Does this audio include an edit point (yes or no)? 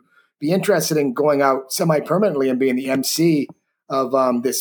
no